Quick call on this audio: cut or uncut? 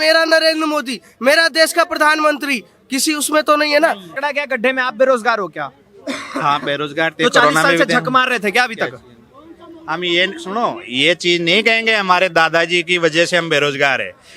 cut